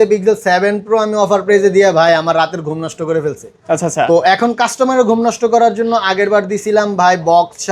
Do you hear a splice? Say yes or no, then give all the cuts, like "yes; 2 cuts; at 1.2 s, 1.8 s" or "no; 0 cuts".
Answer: no; 0 cuts